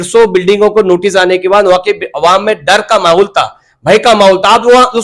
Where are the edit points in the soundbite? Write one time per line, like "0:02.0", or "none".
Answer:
none

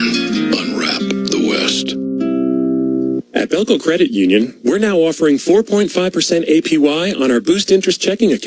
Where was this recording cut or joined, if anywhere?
0:03.4

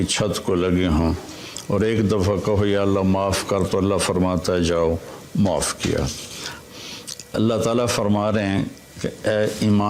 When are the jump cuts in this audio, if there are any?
0:06.6

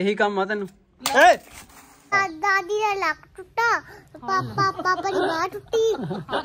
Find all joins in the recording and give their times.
0:02.1

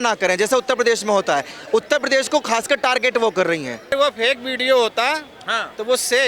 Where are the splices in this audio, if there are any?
0:03.9

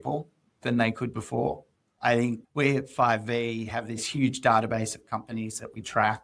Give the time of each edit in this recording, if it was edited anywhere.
none

